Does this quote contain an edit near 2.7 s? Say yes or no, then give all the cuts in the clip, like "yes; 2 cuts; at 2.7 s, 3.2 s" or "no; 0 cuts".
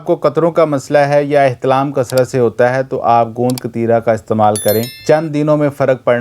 no; 1 cut; at 4.9 s